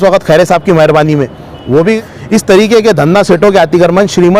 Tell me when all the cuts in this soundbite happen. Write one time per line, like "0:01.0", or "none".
0:02.1